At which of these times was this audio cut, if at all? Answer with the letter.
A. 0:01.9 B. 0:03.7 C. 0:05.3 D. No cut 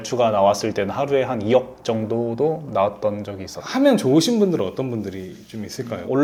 D